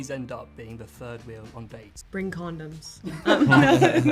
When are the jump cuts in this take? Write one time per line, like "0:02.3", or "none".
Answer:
0:01.9